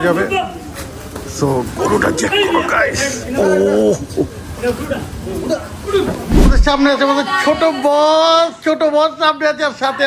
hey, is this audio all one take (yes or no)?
no